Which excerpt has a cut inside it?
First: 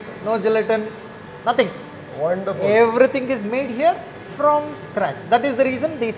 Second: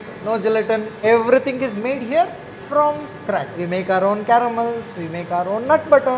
second; 2 cuts; at 1.0 s, 3.5 s

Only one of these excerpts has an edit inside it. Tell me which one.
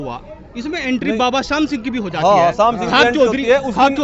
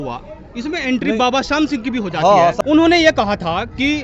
second; 1 cut; at 2.6 s

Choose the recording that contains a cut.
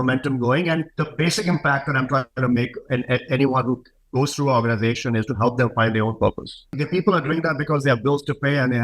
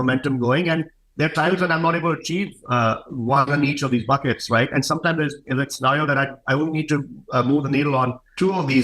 first; 2 cuts; at 1.0 s, 6.7 s

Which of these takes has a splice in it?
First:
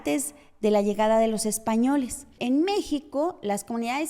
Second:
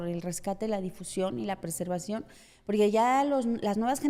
first; 1 cut; at 2.4 s

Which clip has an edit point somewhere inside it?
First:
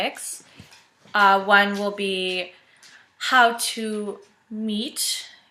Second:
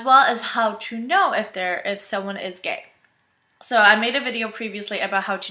first; 1 cut; at 0.9 s

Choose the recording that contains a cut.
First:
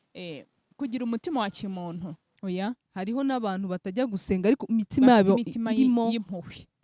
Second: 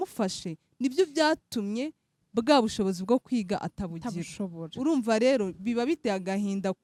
first; 1 cut; at 2.3 s

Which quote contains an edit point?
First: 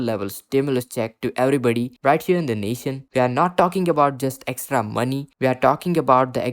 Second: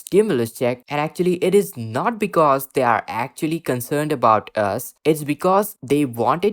first; 1 cut; at 3.0 s

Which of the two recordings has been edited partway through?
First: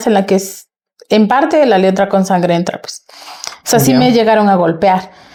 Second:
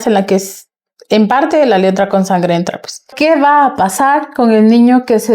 second; 1 cut; at 3.1 s

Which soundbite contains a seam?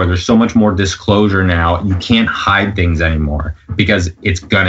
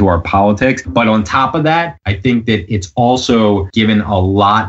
second; 3 cuts; at 0.8 s, 2.0 s, 3.7 s

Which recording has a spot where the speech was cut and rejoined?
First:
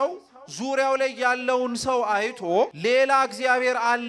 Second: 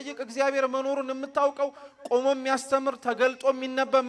first; 1 cut; at 2.8 s

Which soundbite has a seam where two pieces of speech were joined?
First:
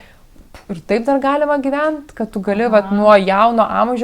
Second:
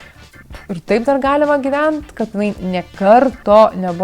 second; 1 cut; at 2.3 s

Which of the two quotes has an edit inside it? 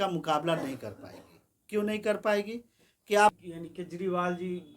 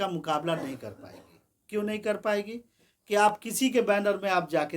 first; 1 cut; at 3.4 s

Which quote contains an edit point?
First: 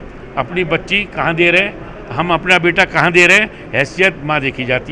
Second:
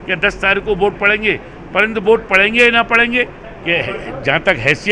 second; 1 cut; at 3.3 s

